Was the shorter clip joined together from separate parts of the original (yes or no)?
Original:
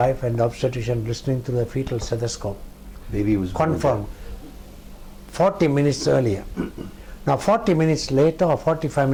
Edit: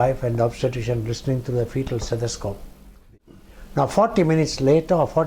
yes